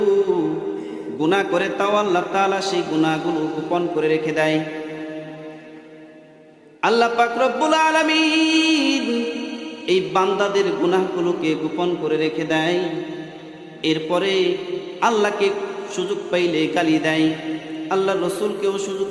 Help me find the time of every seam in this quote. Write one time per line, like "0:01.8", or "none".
none